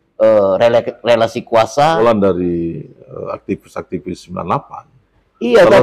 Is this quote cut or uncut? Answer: cut